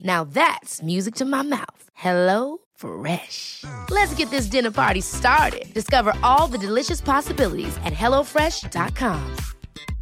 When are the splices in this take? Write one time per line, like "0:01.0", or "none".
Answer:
none